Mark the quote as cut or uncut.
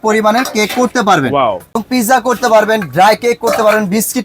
cut